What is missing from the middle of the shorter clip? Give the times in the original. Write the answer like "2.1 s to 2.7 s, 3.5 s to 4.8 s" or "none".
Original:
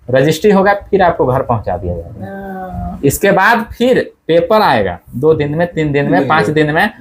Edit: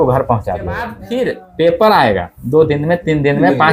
2.2 s to 3.7 s